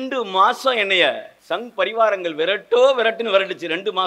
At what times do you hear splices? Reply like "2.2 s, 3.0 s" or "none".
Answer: 1.3 s